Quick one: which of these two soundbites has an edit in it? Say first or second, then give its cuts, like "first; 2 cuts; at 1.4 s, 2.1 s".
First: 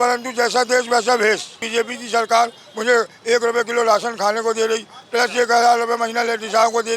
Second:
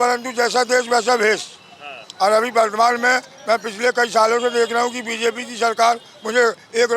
first; 1 cut; at 1.6 s